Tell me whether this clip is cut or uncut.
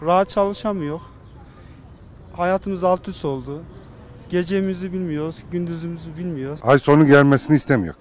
cut